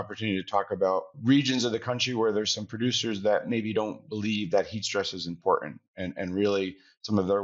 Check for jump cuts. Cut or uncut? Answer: cut